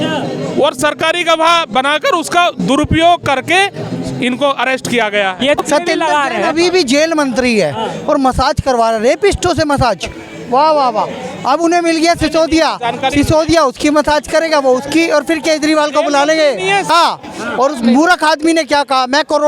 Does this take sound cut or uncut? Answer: cut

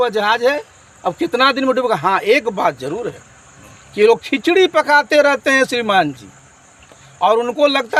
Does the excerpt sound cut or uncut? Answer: uncut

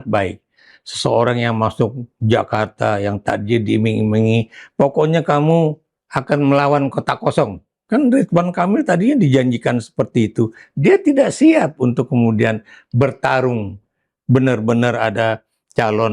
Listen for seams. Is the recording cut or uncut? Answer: uncut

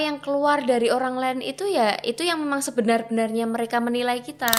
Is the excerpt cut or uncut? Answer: uncut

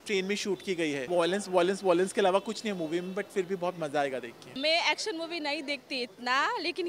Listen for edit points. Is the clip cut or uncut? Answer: cut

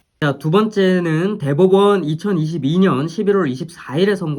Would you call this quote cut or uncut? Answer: uncut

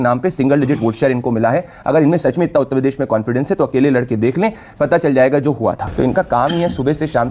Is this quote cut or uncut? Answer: cut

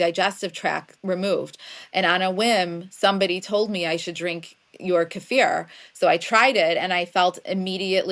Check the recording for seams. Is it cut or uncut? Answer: uncut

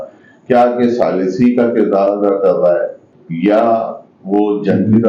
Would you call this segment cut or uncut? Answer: uncut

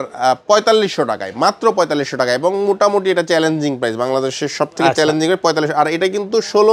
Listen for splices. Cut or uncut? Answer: uncut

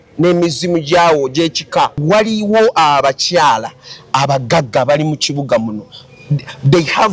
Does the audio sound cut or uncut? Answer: cut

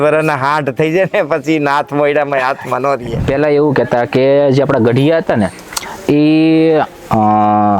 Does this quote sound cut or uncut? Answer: cut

